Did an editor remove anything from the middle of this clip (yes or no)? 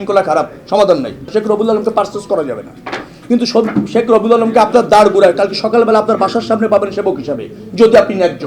yes